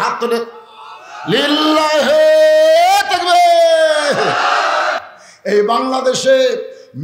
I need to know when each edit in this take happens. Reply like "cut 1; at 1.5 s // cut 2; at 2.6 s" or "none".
cut 1; at 5.0 s